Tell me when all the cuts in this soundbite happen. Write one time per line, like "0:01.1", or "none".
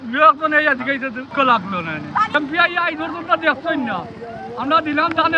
0:01.3
0:02.3